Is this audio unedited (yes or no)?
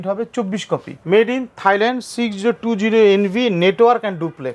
no